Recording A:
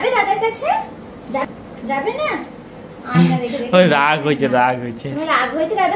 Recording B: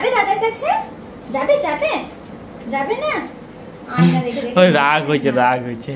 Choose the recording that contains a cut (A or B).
A